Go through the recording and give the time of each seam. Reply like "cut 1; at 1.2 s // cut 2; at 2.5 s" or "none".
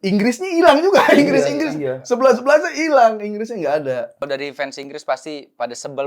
cut 1; at 4.3 s